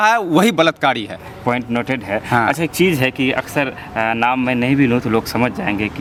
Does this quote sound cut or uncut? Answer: uncut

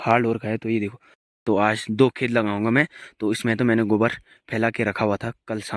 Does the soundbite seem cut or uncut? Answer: cut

